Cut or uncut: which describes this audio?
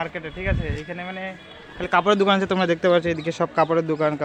uncut